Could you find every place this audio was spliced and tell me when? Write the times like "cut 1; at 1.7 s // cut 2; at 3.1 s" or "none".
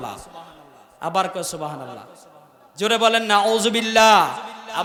none